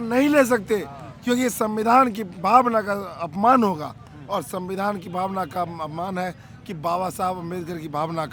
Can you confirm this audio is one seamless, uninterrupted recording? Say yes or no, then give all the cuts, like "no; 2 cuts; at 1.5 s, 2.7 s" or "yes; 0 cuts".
yes; 0 cuts